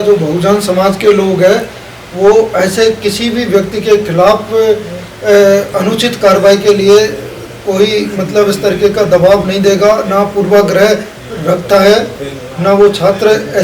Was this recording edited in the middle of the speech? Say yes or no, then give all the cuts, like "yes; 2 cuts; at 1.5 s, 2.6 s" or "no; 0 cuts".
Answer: no; 0 cuts